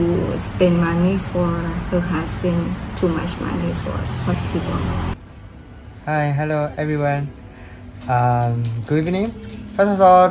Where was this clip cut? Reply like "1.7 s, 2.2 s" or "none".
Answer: 5.1 s